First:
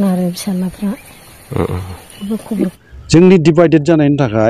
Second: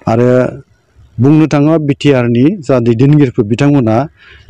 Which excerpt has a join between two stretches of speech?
first; 1 cut; at 2.7 s

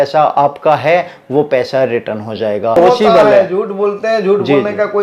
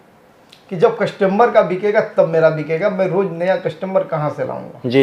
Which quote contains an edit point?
first; 1 cut; at 2.8 s

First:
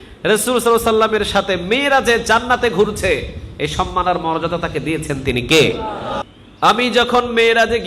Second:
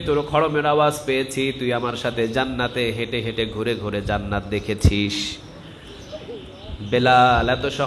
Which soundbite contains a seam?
first; 1 cut; at 6.2 s

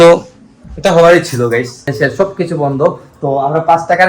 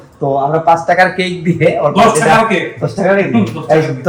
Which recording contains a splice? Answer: first; 1 cut; at 1.8 s

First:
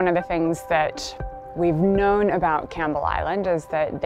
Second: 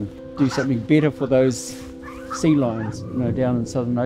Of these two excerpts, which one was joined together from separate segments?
second; 1 cut; at 3.0 s

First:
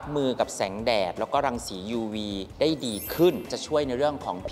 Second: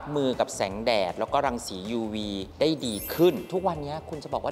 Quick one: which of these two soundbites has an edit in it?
first; 1 cut; at 3.5 s

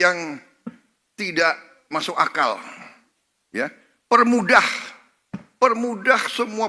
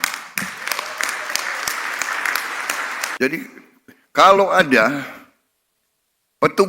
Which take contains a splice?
second; 1 cut; at 3.0 s

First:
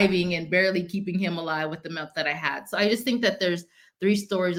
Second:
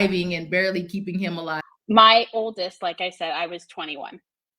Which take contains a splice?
second; 1 cut; at 1.6 s

